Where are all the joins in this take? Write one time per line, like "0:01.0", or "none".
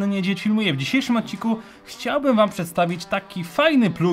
none